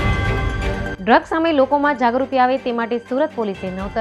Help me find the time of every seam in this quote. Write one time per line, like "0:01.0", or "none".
0:00.9